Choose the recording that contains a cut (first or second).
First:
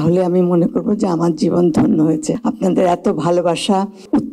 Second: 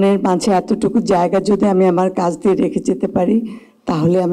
first